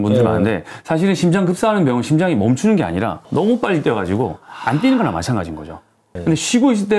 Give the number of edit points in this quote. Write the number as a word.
one